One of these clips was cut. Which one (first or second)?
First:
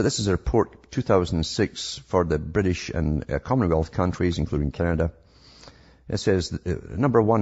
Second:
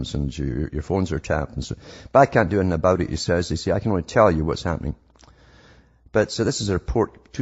first